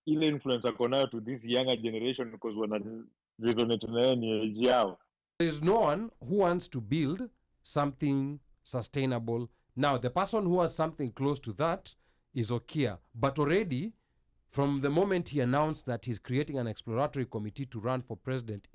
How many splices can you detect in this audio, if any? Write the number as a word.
one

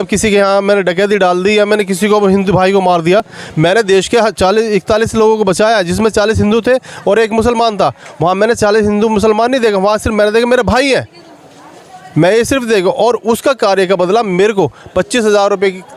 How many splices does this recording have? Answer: zero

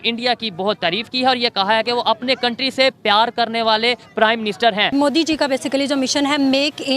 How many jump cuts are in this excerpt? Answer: one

